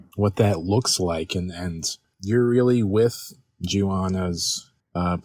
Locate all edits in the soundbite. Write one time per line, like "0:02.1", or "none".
0:02.0